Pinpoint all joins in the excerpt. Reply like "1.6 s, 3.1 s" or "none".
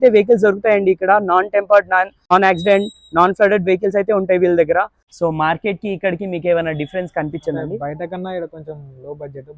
2.3 s, 5.0 s